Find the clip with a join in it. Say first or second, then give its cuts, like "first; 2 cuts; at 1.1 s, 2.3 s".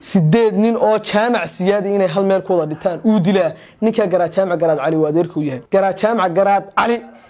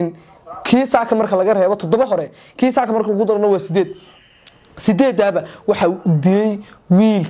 first; 1 cut; at 5.6 s